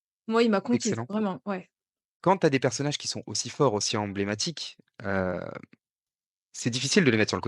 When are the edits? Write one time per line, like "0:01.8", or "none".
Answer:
0:02.0